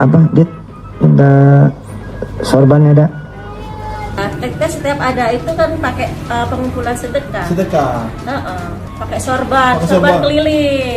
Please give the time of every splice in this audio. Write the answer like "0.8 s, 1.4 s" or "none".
4.2 s